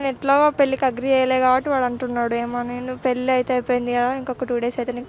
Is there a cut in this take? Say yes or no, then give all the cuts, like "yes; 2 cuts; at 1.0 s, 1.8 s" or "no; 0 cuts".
no; 0 cuts